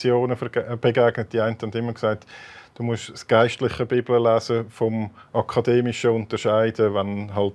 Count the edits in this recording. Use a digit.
0